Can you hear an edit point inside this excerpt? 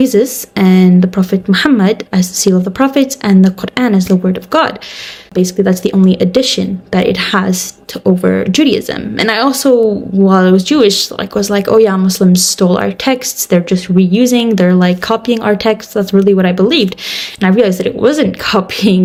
no; 0 cuts

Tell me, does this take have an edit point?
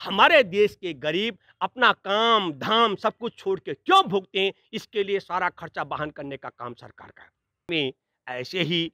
yes; 1 cut; at 7.7 s

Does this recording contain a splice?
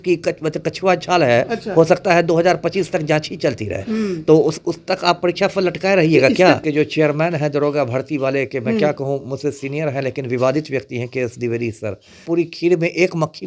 yes; 2 cuts; at 6.6 s, 12.2 s

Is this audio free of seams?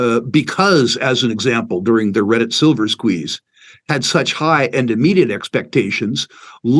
yes; 0 cuts

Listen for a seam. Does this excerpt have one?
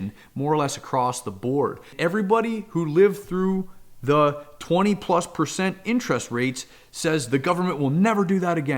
yes; 1 cut; at 1.9 s

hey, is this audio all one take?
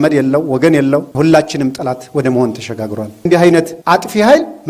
no; 2 cuts; at 1.1 s, 3.3 s

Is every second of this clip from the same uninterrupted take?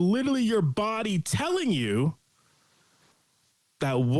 yes; 0 cuts

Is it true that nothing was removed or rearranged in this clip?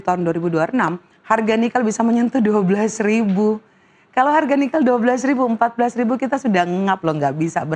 yes; 0 cuts

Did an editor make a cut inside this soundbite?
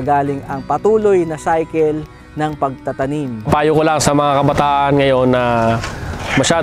yes; 1 cut; at 3.4 s

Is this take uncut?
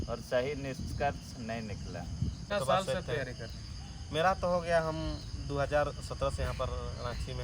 no; 1 cut; at 2.5 s

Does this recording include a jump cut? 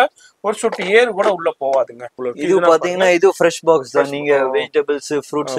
yes; 1 cut; at 2.2 s

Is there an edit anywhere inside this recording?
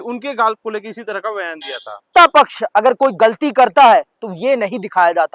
yes; 1 cut; at 2.1 s

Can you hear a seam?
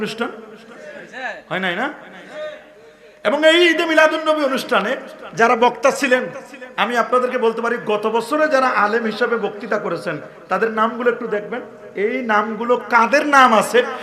no; 0 cuts

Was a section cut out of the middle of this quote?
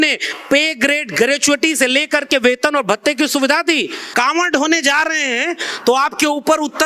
yes; 1 cut; at 4.0 s

